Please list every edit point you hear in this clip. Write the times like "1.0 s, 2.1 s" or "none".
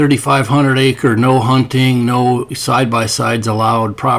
none